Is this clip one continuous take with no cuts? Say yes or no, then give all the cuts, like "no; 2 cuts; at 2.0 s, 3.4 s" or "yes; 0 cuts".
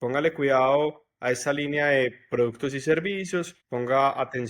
no; 1 cut; at 3.6 s